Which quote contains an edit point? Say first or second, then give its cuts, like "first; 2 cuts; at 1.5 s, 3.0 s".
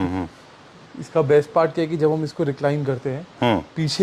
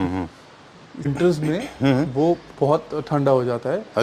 second; 1 cut; at 1.1 s